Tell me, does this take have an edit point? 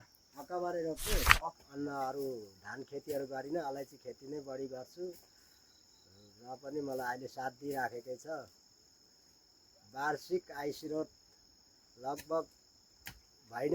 yes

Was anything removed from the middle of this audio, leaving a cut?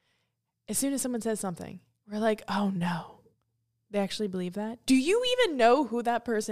no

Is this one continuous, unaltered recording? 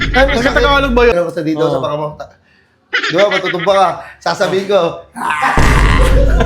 no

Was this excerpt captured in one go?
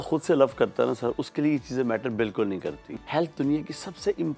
no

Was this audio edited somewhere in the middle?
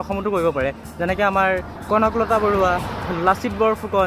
no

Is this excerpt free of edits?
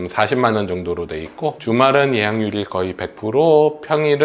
yes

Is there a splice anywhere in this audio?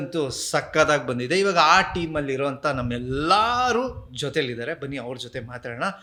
no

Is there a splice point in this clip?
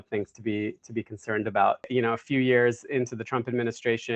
yes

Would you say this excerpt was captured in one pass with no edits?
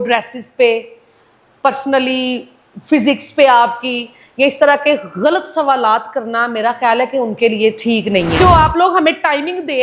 no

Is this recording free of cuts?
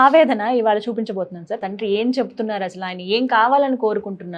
no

